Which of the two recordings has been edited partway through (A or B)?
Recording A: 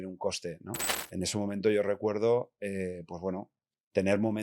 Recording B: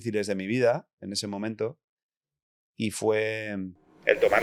A